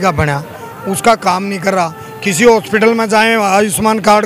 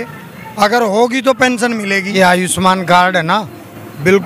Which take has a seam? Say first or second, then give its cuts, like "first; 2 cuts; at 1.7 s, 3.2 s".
second; 1 cut; at 2.1 s